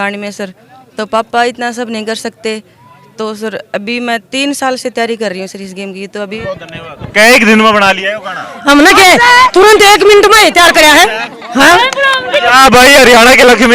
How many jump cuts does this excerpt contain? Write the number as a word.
one